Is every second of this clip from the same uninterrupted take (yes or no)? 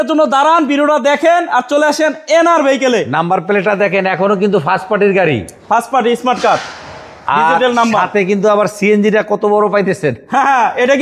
yes